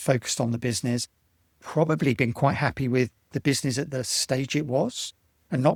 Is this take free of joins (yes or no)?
yes